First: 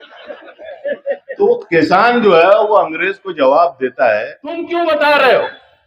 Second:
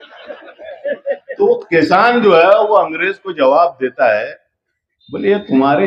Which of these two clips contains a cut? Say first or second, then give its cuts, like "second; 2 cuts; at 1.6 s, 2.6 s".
first; 1 cut; at 4.6 s